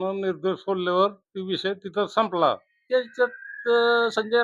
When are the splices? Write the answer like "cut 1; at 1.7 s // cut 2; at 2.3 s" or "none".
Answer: cut 1; at 2.7 s